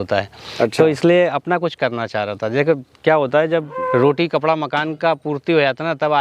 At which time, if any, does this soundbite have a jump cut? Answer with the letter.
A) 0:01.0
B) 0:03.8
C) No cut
B